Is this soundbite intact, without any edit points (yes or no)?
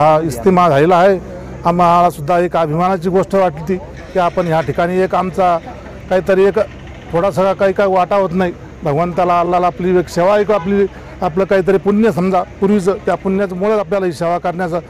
yes